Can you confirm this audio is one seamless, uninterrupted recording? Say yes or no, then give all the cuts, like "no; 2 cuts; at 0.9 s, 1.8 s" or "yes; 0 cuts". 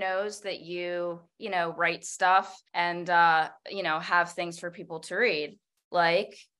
no; 2 cuts; at 2.6 s, 3.6 s